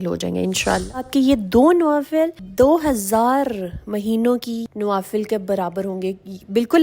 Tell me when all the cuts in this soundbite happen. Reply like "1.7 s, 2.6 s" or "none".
1.1 s